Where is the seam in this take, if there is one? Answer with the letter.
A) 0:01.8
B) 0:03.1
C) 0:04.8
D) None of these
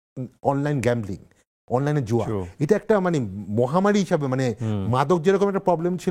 D